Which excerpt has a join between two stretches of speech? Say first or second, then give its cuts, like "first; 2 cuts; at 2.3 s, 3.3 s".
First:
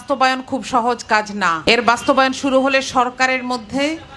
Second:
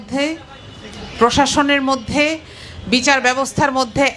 first; 1 cut; at 1.6 s